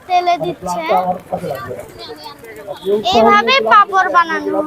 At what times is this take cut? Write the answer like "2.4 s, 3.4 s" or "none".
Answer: none